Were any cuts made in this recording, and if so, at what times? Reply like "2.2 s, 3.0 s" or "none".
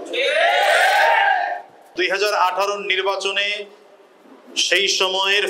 1.9 s